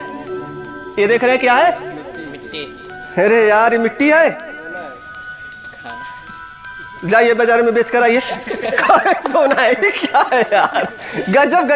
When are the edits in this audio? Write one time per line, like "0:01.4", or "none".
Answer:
none